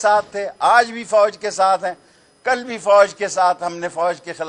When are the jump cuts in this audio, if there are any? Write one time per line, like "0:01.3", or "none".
none